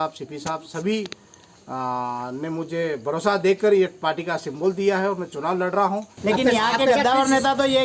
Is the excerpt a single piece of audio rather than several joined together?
no; 1 cut; at 6.1 s

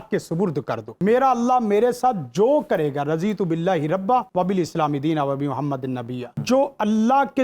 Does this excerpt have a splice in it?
yes; 3 cuts; at 1.0 s, 4.3 s, 6.4 s

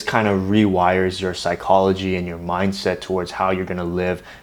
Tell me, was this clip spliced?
no; 0 cuts

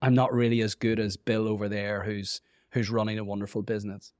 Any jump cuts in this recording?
no; 0 cuts

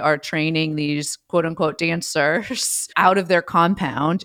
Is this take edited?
no; 0 cuts

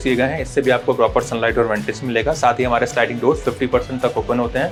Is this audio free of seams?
yes; 0 cuts

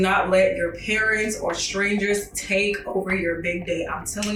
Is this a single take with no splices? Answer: yes; 0 cuts

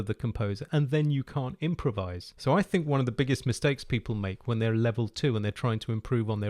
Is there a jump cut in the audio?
no; 0 cuts

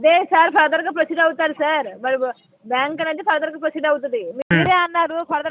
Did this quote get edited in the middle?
yes; 1 cut; at 4.3 s

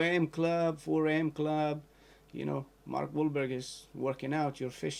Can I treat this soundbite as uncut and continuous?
yes; 0 cuts

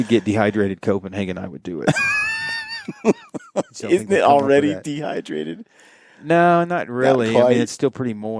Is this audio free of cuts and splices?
yes; 0 cuts

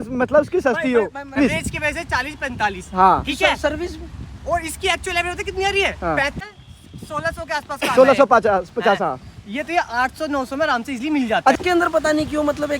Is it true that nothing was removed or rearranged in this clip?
no; 3 cuts; at 1.4 s, 6.4 s, 11.5 s

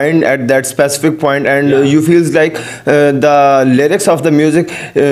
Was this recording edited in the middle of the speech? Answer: no; 0 cuts

